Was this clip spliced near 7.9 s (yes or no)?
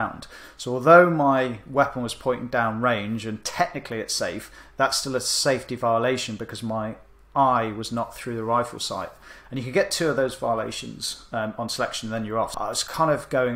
no